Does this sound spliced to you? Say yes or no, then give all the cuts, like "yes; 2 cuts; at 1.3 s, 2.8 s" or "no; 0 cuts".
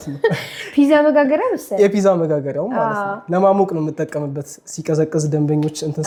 no; 0 cuts